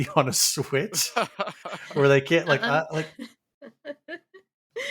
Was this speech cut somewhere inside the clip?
yes; 1 cut; at 3.0 s

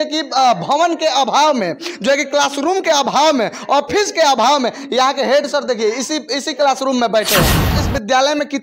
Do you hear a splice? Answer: yes; 1 cut; at 7.6 s

